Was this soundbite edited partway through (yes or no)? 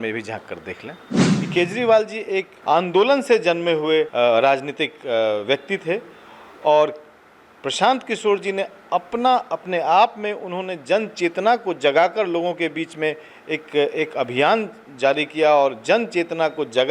yes